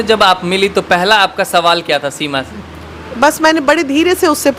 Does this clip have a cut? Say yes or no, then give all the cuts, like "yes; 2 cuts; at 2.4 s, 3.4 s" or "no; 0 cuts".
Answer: no; 0 cuts